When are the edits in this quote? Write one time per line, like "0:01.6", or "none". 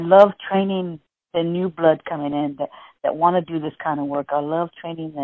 none